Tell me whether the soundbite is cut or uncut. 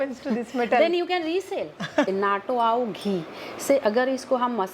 cut